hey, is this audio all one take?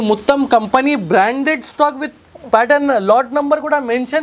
yes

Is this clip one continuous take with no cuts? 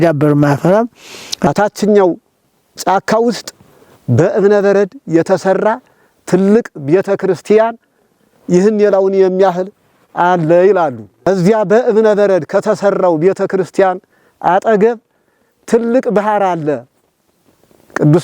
no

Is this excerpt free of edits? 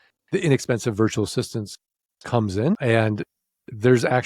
no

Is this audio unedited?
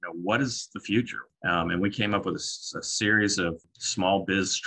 no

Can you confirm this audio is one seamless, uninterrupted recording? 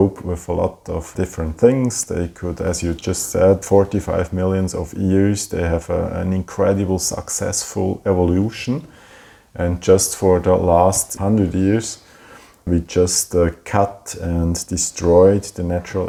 yes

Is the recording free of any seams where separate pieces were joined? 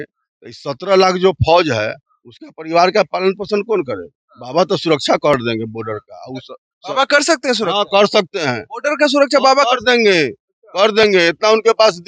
yes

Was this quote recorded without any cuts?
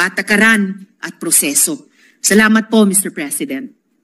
yes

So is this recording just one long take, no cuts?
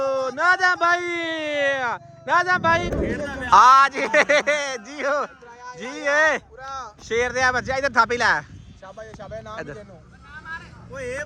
no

